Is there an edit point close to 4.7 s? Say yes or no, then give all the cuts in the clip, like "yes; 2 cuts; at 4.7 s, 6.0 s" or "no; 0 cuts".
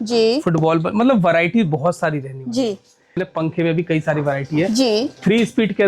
no; 1 cut; at 3.2 s